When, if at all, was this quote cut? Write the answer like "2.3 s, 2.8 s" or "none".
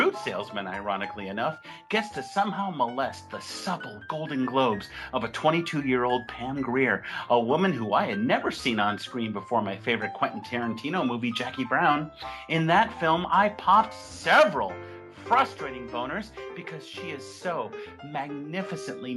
6.3 s